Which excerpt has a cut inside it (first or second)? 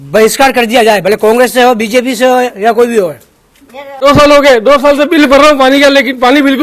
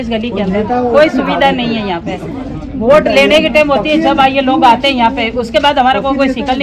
first